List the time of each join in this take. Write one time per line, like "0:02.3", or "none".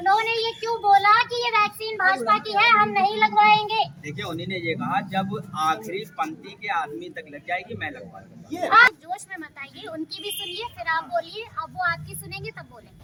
none